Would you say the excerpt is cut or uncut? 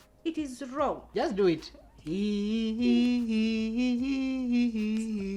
cut